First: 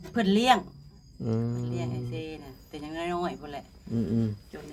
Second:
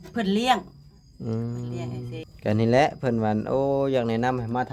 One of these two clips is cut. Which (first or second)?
second